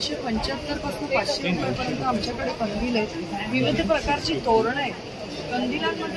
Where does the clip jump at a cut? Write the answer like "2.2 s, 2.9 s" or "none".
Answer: none